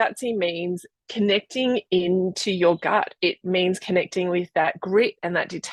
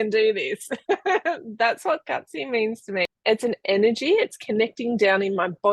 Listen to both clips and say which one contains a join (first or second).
second